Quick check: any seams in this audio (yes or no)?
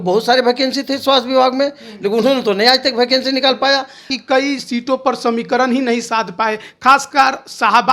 yes